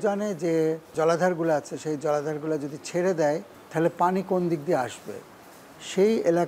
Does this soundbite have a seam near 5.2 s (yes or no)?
no